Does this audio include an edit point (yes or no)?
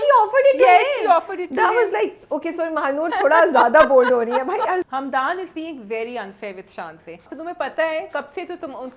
yes